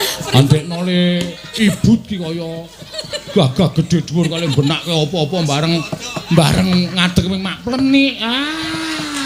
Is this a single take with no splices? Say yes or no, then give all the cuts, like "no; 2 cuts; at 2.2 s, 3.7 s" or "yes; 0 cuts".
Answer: yes; 0 cuts